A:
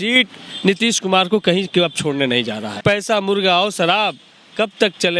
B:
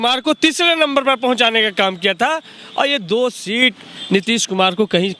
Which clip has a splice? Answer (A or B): A